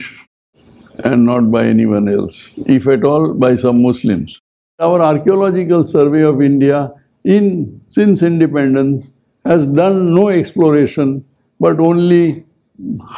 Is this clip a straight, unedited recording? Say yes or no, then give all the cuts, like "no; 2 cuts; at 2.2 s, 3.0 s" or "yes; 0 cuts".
no; 1 cut; at 4.8 s